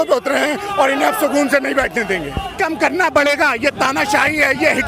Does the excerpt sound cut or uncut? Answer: cut